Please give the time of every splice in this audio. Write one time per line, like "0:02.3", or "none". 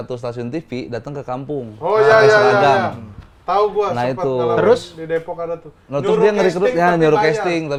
none